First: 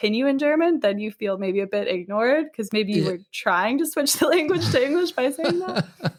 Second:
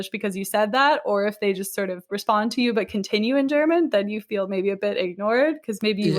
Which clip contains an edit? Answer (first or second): second